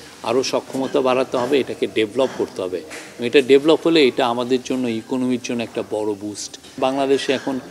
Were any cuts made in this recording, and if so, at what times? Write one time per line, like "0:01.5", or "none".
0:06.8